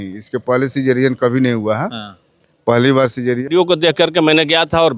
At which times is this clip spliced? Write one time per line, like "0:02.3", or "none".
0:03.5